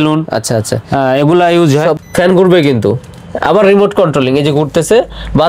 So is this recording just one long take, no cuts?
no; 1 cut; at 2.0 s

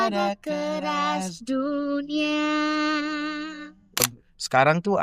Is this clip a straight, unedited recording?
no; 1 cut; at 4.0 s

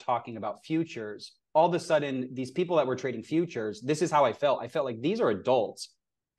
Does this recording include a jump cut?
no; 0 cuts

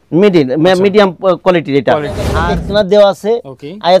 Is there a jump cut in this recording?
yes; 1 cut; at 2.3 s

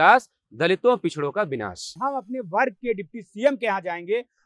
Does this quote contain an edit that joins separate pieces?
yes; 1 cut; at 2.0 s

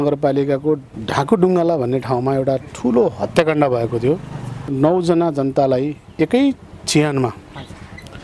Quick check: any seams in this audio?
yes; 2 cuts; at 0.9 s, 4.7 s

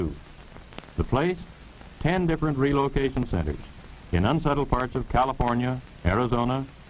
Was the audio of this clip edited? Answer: yes; 1 cut; at 2.0 s

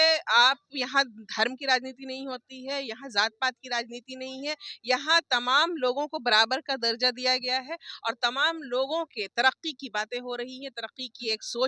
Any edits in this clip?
no; 0 cuts

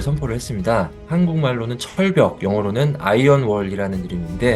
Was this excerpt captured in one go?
no; 1 cut; at 1.0 s

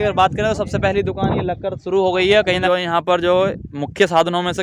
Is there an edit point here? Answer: yes; 1 cut; at 2.6 s

